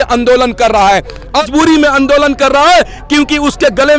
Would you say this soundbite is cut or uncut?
cut